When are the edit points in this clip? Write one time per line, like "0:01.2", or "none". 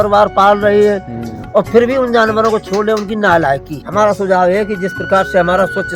0:03.8